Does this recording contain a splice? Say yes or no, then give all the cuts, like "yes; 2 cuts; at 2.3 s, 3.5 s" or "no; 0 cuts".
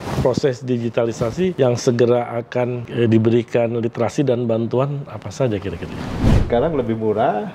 yes; 3 cuts; at 1.5 s, 2.8 s, 6.2 s